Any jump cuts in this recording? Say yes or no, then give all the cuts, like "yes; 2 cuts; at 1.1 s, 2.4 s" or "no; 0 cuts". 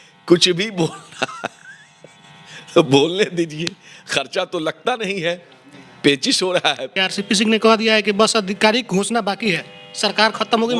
yes; 1 cut; at 7.0 s